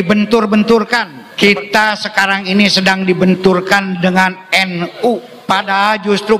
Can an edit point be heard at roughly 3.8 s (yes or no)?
no